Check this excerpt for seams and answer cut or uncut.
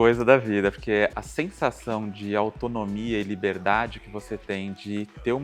cut